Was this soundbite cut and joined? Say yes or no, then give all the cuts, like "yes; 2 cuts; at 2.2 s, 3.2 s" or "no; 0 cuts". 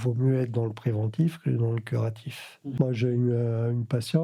yes; 1 cut; at 2.7 s